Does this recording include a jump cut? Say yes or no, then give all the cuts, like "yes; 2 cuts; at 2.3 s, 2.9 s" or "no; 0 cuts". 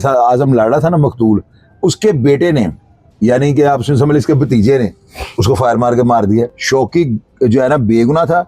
yes; 1 cut; at 6.6 s